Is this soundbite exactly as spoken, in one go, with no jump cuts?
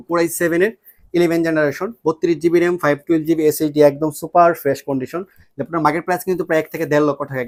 yes; 0 cuts

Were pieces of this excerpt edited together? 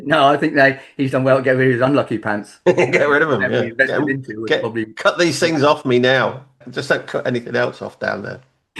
yes; 1 cut; at 6.7 s

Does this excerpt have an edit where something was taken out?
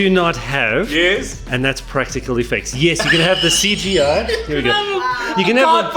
no; 0 cuts

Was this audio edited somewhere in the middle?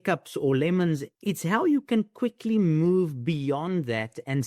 yes; 1 cut; at 1.1 s

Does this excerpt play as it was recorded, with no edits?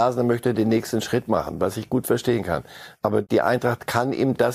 no; 1 cut; at 3.2 s

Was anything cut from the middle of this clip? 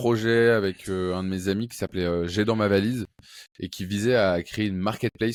no; 0 cuts

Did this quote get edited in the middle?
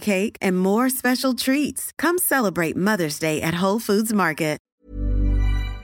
yes; 1 cut; at 4.6 s

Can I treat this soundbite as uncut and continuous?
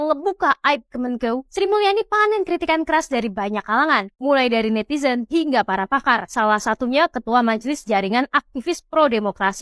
yes; 0 cuts

